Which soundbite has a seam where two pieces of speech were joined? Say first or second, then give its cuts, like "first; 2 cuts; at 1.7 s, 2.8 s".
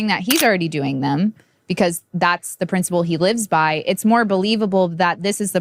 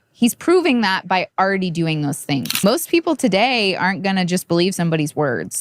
second; 1 cut; at 2.5 s